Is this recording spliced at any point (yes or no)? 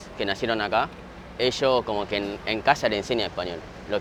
no